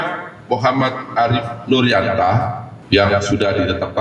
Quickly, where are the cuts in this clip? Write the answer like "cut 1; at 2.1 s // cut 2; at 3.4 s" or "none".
cut 1; at 2.7 s